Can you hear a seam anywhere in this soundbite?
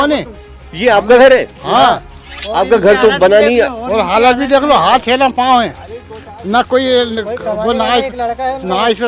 no; 0 cuts

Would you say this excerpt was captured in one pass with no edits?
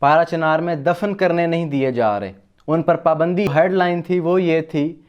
no; 1 cut; at 3.5 s

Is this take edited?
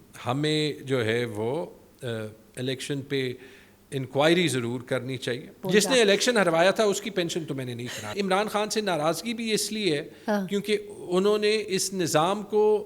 yes; 2 cuts; at 5.6 s, 8.1 s

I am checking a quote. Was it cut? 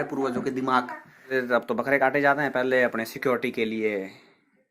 yes; 1 cut; at 1.3 s

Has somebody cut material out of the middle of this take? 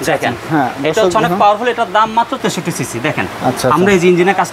yes; 1 cut; at 2.4 s

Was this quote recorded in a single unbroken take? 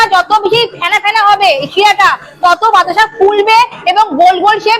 yes; 0 cuts

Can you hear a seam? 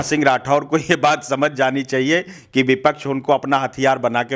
no; 0 cuts

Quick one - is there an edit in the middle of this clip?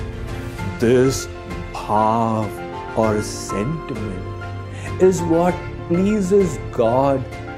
no; 0 cuts

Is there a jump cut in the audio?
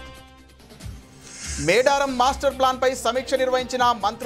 yes; 1 cut; at 1.0 s

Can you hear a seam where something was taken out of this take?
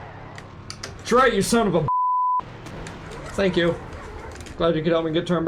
no; 0 cuts

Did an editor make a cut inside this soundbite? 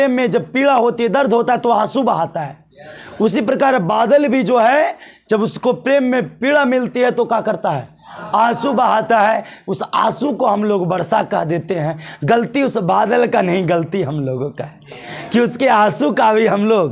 no; 0 cuts

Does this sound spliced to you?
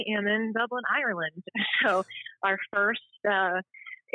no; 0 cuts

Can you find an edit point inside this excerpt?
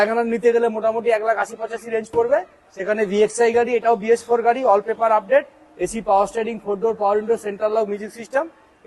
no; 0 cuts

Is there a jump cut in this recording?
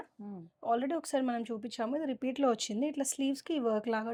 no; 0 cuts

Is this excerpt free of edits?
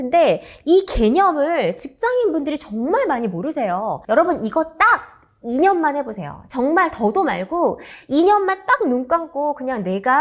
no; 1 cut; at 4.0 s

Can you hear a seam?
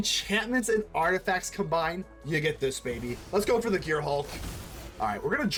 no; 0 cuts

